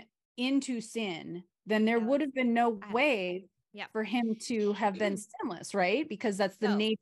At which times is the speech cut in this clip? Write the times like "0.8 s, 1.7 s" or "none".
none

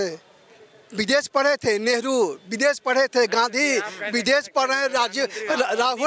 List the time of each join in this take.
none

